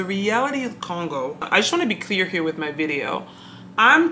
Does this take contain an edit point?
yes; 1 cut; at 1.4 s

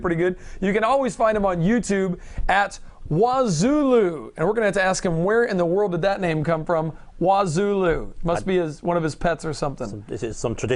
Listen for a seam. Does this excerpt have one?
no; 0 cuts

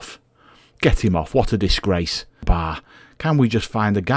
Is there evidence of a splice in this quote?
yes; 1 cut; at 2.5 s

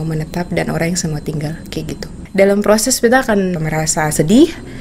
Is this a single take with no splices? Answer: no; 2 cuts; at 2.2 s, 3.6 s

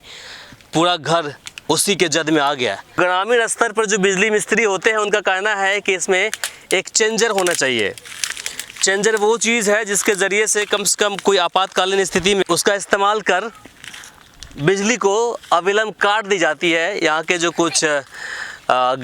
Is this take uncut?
no; 2 cuts; at 2.9 s, 12.4 s

